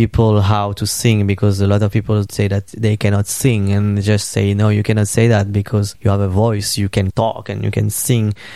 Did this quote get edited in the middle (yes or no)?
yes